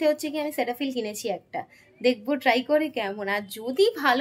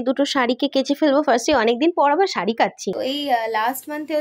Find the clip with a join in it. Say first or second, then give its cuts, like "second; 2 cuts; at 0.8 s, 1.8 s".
second; 1 cut; at 2.9 s